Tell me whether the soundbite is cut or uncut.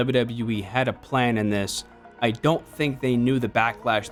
uncut